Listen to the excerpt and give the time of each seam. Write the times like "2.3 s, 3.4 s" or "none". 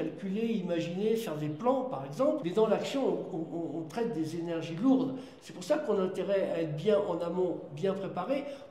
2.4 s